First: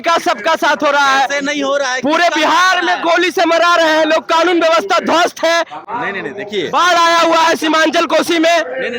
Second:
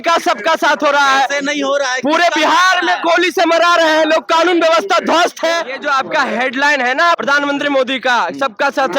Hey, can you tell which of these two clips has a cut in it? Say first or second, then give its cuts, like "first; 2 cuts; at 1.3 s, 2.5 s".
second; 2 cuts; at 5.7 s, 7.2 s